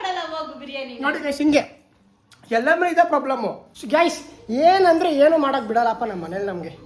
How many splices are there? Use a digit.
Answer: 1